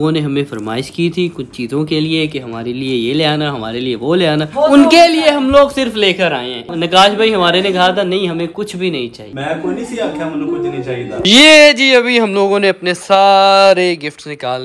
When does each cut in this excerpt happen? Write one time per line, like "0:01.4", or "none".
0:06.6
0:09.3
0:11.2